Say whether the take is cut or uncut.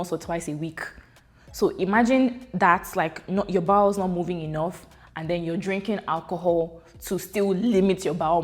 uncut